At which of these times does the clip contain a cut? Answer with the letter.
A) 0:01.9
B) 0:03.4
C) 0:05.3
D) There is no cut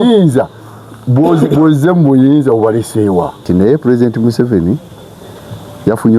B